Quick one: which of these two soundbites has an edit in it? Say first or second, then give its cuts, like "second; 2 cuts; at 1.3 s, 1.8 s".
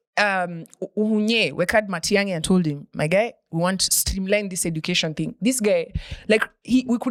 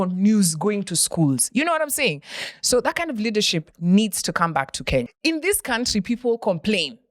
second; 1 cut; at 5.1 s